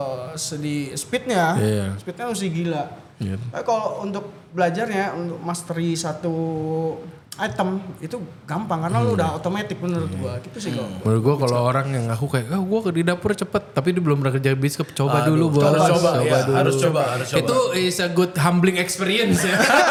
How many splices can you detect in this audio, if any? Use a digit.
0